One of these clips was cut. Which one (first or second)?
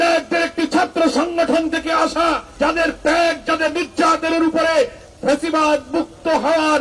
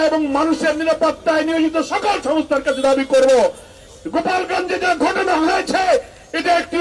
first